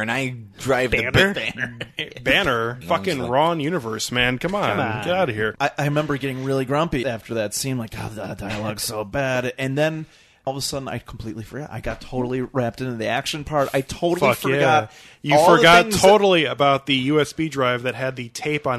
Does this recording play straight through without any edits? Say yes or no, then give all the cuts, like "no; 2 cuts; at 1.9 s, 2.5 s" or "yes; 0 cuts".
no; 4 cuts; at 2.8 s, 5.5 s, 7.0 s, 10.5 s